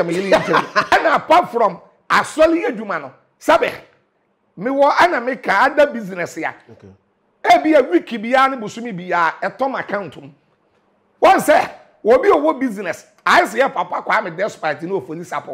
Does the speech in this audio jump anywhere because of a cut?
yes; 1 cut; at 0.9 s

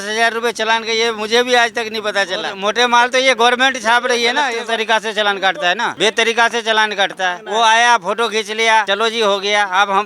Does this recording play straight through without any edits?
no; 5 cuts; at 2.6 s, 4.5 s, 5.9 s, 7.4 s, 8.9 s

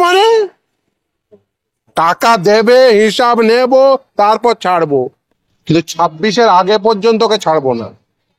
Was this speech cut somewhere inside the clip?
yes; 1 cut; at 5.1 s

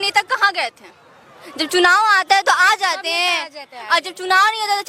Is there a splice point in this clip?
no; 0 cuts

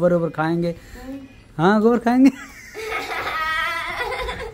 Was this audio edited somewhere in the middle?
no; 0 cuts

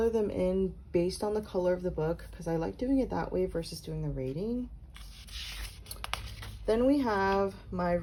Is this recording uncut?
yes; 0 cuts

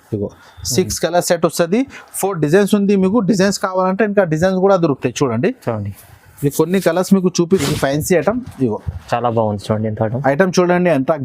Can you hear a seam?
yes; 1 cut; at 7.6 s

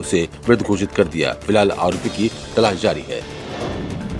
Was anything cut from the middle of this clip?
yes; 1 cut; at 3.3 s

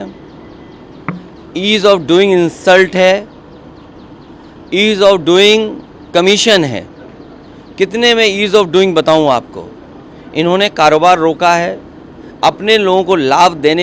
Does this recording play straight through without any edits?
yes; 0 cuts

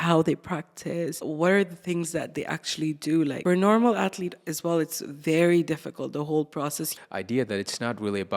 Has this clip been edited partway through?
yes; 3 cuts; at 1.2 s, 3.4 s, 6.9 s

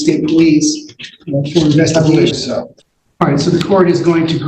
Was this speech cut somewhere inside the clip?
yes; 1 cut; at 2.3 s

